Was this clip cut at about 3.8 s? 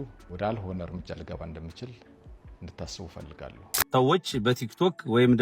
yes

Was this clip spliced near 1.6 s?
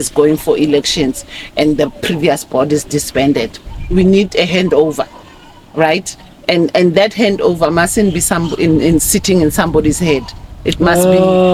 no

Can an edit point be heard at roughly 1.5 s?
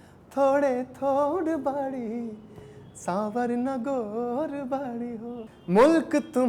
no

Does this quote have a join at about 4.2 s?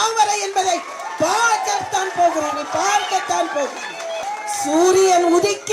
yes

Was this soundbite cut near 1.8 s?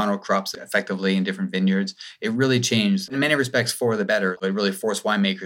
no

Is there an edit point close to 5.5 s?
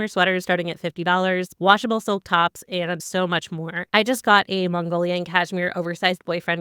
no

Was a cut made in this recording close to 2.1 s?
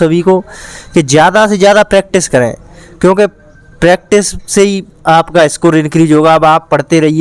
no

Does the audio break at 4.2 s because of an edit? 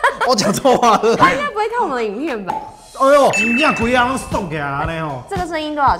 no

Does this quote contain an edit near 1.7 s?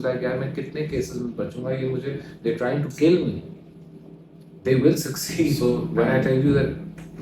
no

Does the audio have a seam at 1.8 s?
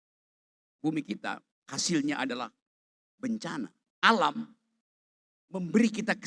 no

